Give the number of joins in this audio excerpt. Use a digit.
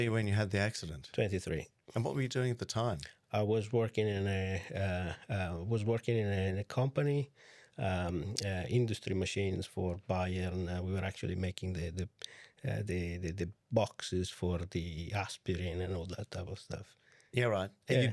0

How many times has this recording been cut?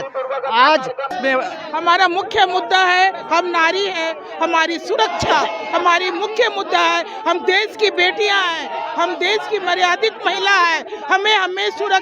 1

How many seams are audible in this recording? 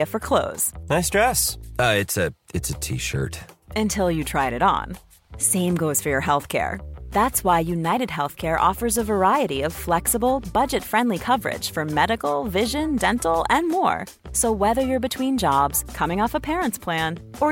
0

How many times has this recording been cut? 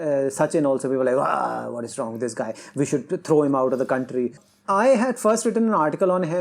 1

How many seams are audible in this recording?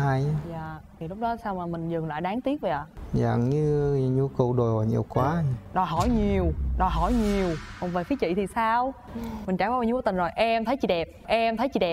2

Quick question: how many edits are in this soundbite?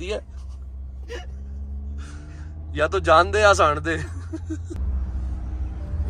1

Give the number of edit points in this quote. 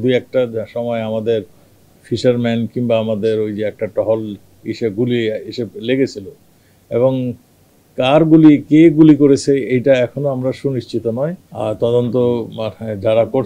1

